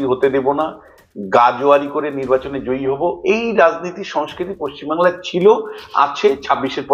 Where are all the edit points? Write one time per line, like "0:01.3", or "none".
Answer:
none

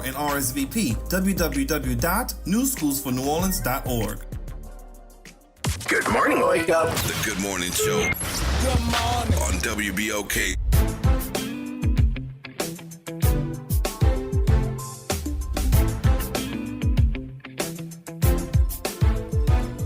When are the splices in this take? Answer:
0:05.5

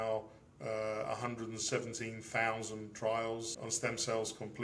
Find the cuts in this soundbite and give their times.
0:03.6

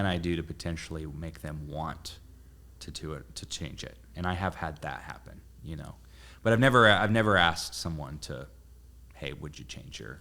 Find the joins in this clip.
none

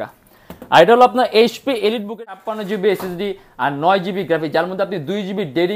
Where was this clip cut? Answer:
0:02.1

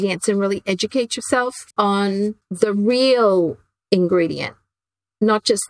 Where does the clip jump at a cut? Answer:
0:01.6
0:02.4

